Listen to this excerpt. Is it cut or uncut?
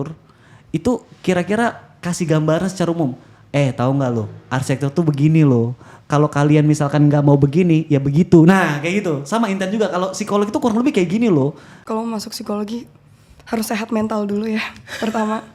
cut